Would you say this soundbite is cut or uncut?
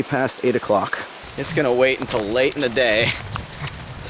cut